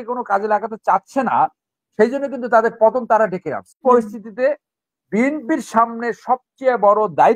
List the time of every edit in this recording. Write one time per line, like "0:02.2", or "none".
0:03.8